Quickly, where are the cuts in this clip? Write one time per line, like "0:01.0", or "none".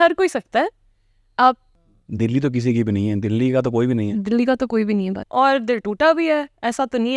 0:01.7
0:05.2